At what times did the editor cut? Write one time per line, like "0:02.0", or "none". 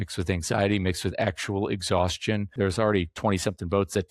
0:02.5